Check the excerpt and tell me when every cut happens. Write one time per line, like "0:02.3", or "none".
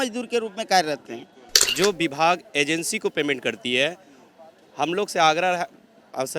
0:01.6